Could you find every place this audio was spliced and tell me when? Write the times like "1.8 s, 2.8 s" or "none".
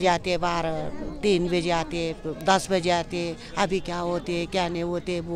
none